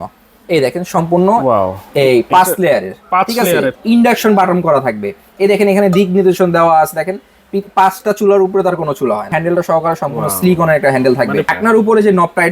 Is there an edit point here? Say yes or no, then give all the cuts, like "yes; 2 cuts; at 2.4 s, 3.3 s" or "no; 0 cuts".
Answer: yes; 3 cuts; at 3.8 s, 9.3 s, 11.5 s